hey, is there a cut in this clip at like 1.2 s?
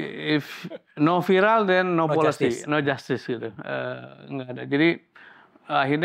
no; 0 cuts

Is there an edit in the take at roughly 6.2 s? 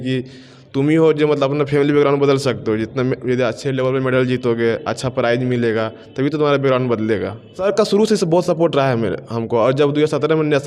no; 1 cut; at 7.6 s

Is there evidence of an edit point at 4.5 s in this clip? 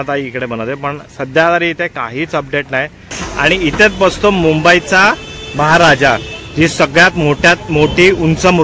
no; 1 cut; at 3.2 s

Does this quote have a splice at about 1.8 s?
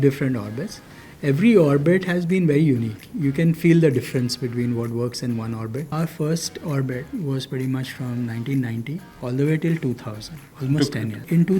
no; 3 cuts; at 5.9 s, 9.1 s, 10.6 s

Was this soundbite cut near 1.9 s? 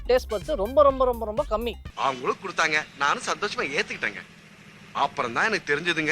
yes; 1 cut; at 1.9 s

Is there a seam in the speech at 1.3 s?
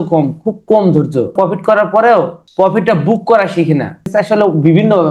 yes; 3 cuts; at 1.3 s, 2.4 s, 4.0 s

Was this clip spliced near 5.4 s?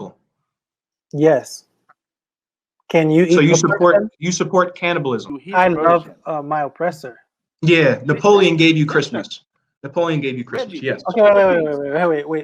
yes; 1 cut; at 5.4 s

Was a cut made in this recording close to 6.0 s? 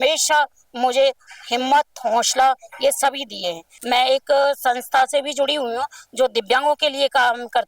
no; 1 cut; at 3.7 s

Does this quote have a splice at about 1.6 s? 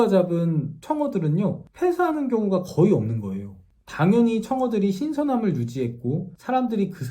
no; 0 cuts

